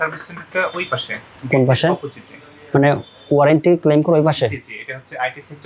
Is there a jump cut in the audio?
no; 0 cuts

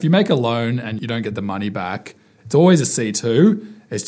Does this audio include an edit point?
yes; 1 cut; at 1.0 s

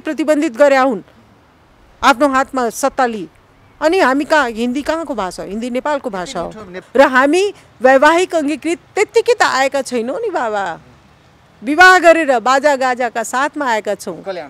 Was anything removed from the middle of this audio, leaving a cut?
yes; 1 cut; at 6.7 s

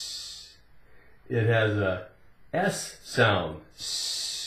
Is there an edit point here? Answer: yes; 1 cut; at 1.2 s

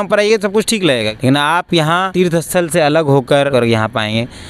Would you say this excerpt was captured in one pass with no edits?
no; 3 cuts; at 1.1 s, 2.1 s, 3.5 s

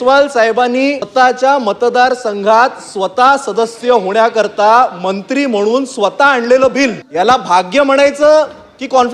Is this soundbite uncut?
no; 2 cuts; at 1.0 s, 7.0 s

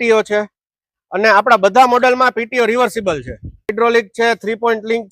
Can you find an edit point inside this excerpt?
yes; 1 cut; at 3.7 s

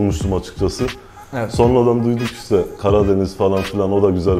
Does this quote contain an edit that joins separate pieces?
no; 0 cuts

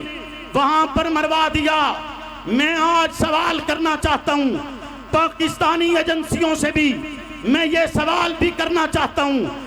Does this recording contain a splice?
no; 0 cuts

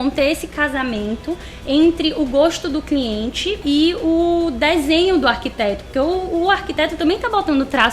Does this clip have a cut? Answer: yes; 1 cut; at 3.6 s

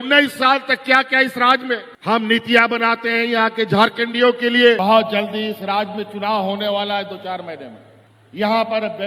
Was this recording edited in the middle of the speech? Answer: yes; 1 cut; at 4.8 s

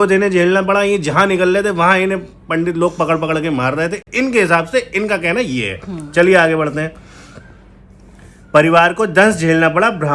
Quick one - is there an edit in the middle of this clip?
no; 0 cuts

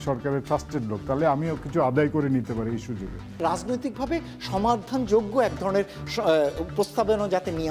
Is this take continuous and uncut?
yes; 0 cuts

